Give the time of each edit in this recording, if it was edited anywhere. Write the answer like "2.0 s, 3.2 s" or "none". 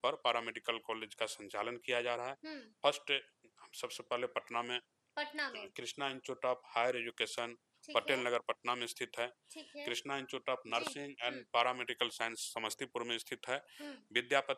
none